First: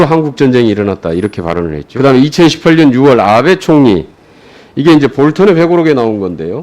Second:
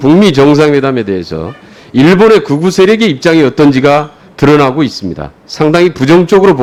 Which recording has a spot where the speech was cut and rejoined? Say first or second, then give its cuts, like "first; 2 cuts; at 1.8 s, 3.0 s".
first; 1 cut; at 1.8 s